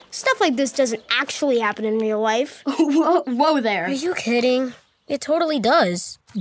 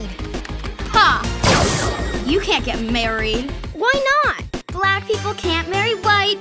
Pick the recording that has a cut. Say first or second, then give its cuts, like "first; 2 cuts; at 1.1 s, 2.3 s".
first; 1 cut; at 2.7 s